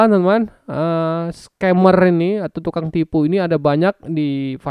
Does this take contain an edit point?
no; 0 cuts

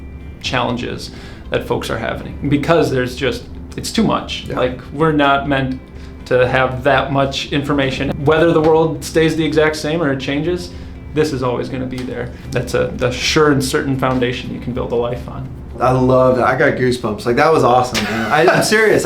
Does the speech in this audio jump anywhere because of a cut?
yes; 3 cuts; at 8.1 s, 12.4 s, 15.7 s

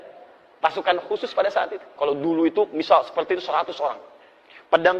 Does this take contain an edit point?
yes; 1 cut; at 1.8 s

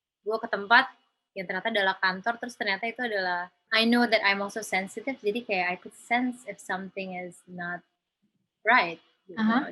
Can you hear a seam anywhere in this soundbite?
yes; 1 cut; at 3.6 s

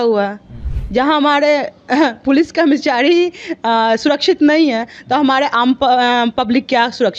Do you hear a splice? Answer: no; 0 cuts

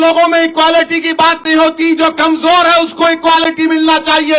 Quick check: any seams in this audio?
no; 0 cuts

